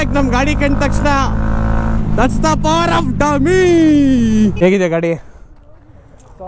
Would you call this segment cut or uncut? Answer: cut